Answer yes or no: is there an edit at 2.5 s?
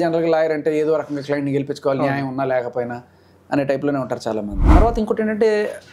no